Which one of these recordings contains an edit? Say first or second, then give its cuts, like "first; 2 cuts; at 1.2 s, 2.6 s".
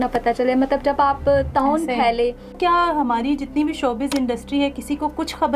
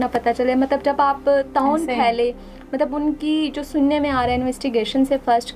first; 1 cut; at 2.6 s